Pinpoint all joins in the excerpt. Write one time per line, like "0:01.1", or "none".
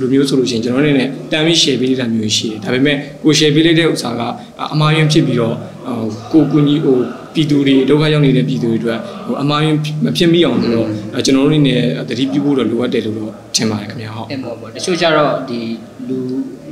none